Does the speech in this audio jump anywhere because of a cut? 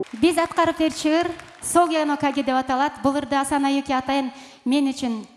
no; 0 cuts

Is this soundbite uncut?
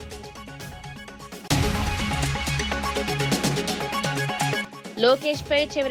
no; 3 cuts; at 1.5 s, 2.8 s, 4.2 s

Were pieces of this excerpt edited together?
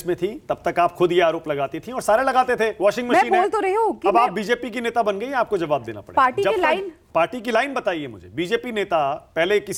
no; 0 cuts

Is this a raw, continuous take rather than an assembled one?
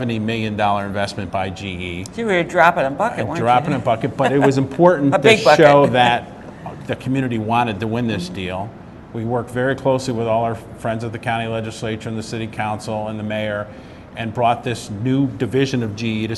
yes; 0 cuts

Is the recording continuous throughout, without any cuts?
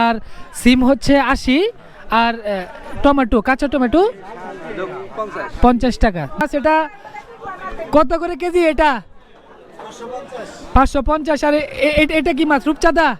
no; 1 cut; at 6.4 s

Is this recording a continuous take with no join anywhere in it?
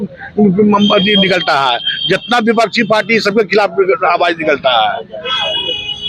yes; 0 cuts

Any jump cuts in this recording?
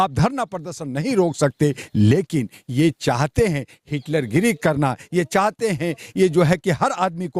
no; 0 cuts

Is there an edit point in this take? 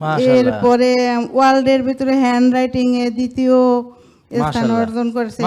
no; 0 cuts

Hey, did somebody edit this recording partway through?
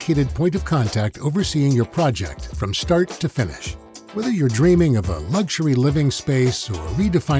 no; 0 cuts

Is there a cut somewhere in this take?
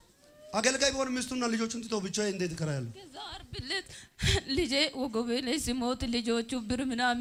no; 0 cuts

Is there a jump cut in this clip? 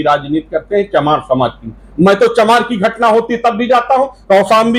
no; 0 cuts

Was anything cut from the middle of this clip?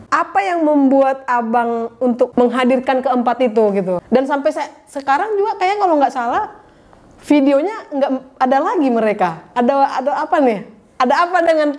yes; 1 cut; at 4.0 s

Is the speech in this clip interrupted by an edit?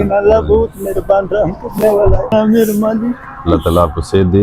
yes; 1 cut; at 2.3 s

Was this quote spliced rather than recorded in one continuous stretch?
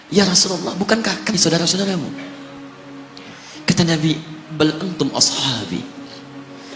yes; 1 cut; at 1.3 s

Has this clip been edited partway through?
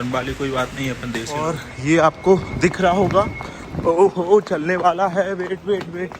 yes; 1 cut; at 1.3 s

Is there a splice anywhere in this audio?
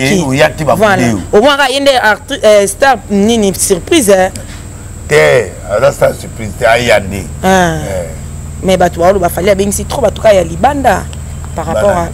no; 0 cuts

